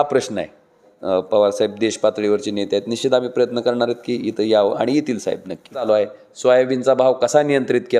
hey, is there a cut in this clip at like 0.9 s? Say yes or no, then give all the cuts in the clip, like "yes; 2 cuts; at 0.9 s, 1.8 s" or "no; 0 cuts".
yes; 2 cuts; at 0.9 s, 5.9 s